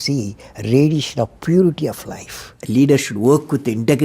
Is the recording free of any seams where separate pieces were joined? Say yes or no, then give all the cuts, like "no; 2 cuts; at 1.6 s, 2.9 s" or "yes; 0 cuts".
no; 1 cut; at 2.5 s